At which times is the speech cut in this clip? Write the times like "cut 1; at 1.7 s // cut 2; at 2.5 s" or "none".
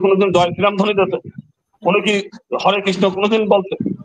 none